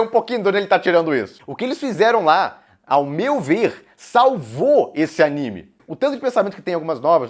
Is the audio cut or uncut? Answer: cut